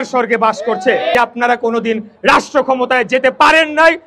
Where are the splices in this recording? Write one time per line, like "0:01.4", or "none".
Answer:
0:01.1